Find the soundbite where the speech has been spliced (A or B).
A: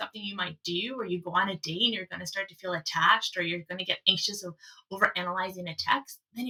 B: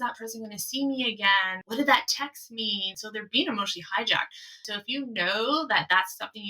B